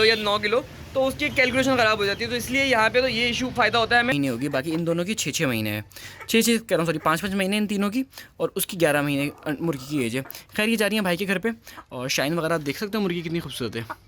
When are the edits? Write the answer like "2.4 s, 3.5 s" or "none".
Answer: 4.1 s